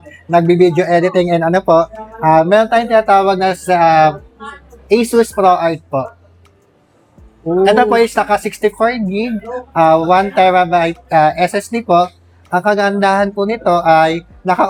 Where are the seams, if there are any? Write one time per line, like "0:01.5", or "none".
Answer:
none